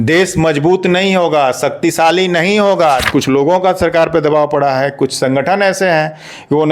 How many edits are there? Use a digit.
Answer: 1